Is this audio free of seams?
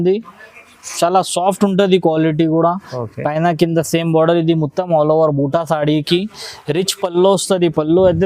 yes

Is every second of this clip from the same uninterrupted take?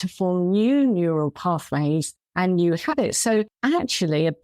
no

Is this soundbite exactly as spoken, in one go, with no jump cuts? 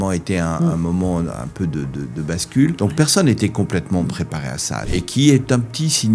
no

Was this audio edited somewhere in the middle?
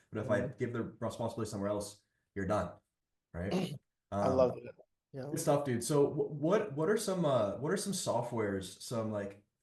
no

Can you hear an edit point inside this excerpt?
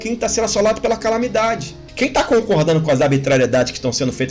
yes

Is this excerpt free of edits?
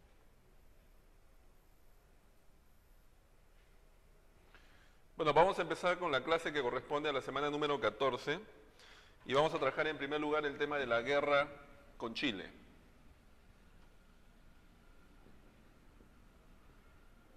yes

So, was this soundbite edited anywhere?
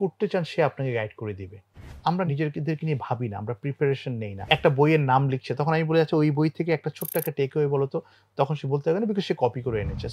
yes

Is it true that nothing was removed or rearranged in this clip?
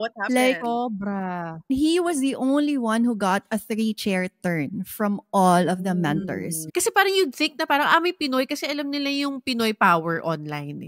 no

